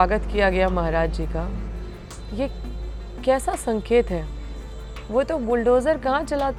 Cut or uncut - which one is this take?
uncut